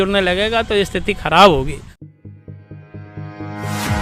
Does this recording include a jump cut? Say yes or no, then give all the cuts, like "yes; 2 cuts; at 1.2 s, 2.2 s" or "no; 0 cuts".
yes; 1 cut; at 2.0 s